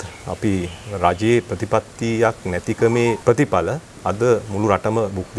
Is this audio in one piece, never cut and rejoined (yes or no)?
no